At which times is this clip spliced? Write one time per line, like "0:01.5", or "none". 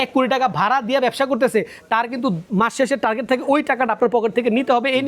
0:02.4